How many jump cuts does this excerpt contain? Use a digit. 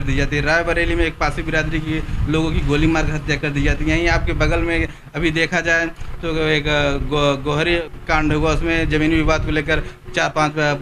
1